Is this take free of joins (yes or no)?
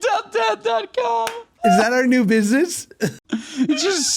no